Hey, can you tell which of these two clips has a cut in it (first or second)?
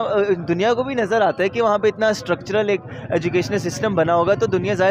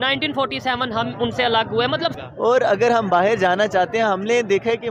second